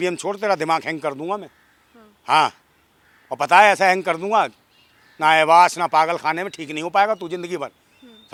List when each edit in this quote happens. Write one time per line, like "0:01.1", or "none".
none